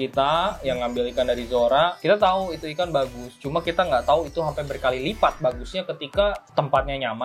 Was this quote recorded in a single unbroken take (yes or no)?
yes